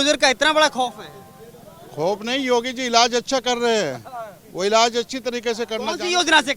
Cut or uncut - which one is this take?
uncut